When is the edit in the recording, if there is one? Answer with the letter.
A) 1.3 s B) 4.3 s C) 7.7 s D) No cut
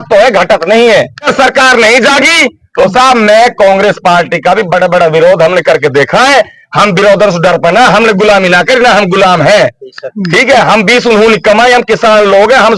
A